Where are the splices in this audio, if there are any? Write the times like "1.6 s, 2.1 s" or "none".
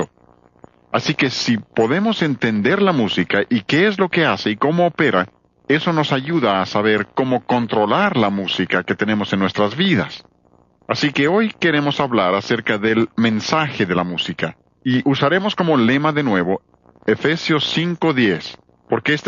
4.6 s